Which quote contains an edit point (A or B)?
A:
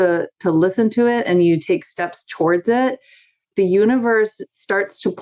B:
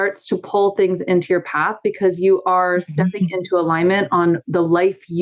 A